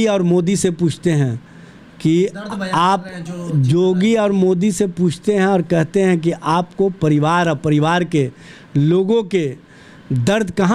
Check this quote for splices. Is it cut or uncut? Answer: uncut